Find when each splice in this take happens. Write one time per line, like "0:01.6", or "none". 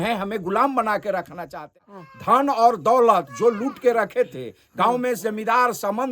0:01.6